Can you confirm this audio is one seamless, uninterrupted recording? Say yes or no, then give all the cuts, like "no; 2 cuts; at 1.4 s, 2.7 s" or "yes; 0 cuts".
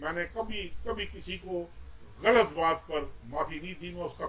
yes; 0 cuts